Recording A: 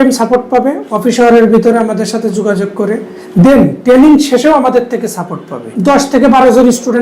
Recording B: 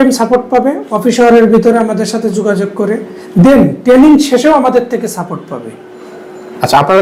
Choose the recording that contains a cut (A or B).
A